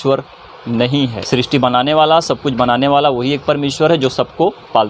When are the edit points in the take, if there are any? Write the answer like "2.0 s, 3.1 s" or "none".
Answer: 1.2 s